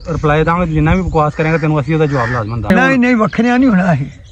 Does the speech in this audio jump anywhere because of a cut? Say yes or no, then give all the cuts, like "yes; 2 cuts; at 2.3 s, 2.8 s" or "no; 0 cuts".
yes; 1 cut; at 2.7 s